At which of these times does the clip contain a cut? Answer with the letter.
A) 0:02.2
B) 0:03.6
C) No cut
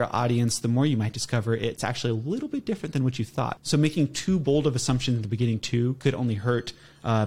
B